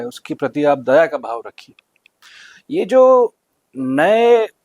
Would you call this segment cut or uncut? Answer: uncut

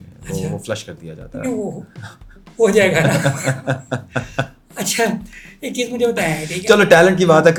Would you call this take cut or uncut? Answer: uncut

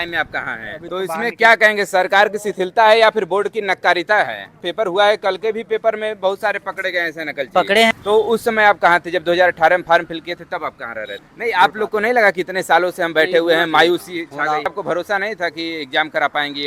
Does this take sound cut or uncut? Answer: cut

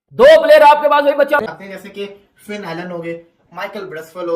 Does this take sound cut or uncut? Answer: cut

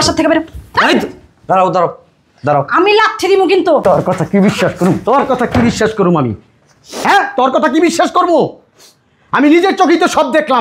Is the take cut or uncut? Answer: cut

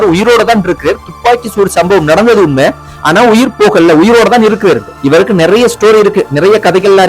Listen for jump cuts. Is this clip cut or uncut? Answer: cut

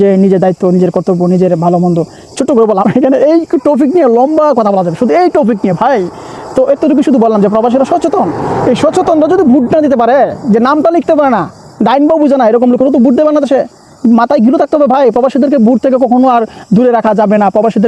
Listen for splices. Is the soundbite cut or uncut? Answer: uncut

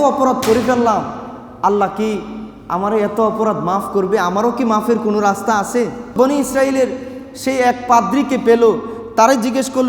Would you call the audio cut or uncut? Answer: cut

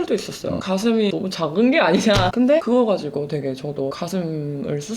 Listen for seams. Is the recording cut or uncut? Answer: cut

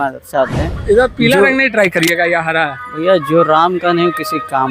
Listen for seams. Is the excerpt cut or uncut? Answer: uncut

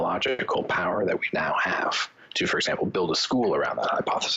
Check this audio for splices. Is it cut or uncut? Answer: uncut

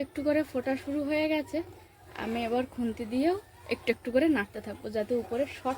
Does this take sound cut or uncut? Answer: uncut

